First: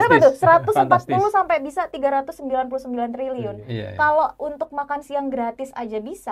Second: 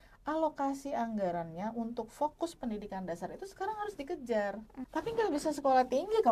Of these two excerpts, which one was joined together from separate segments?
second; 1 cut; at 4.7 s

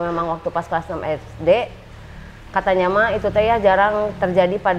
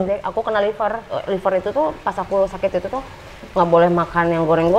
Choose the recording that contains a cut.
second; 1 cut; at 1.1 s

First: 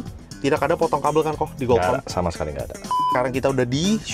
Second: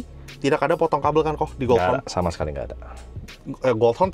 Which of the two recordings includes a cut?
first; 1 cut; at 3.1 s

